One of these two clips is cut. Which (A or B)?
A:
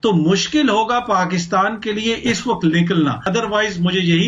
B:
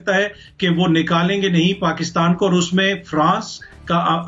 A